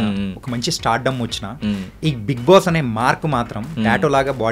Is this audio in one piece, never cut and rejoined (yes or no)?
yes